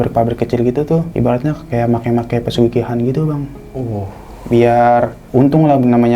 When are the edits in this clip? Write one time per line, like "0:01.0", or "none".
0:01.1